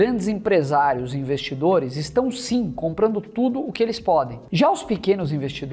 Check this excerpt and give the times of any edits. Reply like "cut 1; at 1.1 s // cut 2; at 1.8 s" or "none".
cut 1; at 4.4 s